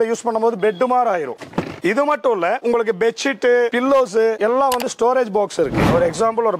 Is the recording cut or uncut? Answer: cut